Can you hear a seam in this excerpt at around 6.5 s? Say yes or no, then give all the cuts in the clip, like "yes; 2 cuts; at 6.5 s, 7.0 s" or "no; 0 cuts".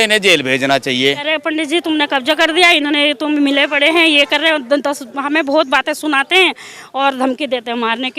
no; 1 cut; at 1.2 s